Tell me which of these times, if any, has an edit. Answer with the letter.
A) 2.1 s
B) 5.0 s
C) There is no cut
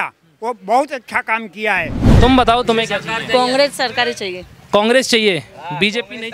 A